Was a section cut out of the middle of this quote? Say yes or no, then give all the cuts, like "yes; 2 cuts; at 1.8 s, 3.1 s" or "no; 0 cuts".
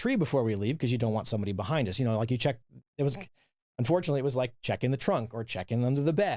no; 0 cuts